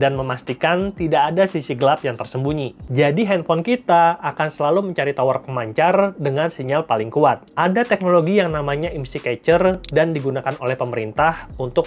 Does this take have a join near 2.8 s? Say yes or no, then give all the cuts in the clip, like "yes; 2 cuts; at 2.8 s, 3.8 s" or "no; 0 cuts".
yes; 2 cuts; at 2.8 s, 7.5 s